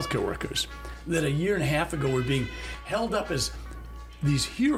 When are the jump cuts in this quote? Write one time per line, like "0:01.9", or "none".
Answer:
none